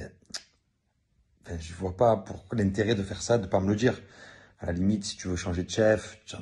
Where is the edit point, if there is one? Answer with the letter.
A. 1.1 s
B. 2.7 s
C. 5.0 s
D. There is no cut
B